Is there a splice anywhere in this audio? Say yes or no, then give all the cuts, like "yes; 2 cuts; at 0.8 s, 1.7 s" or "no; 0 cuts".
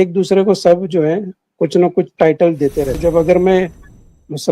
yes; 1 cut; at 3.0 s